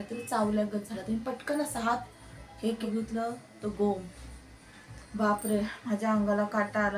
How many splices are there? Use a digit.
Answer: 1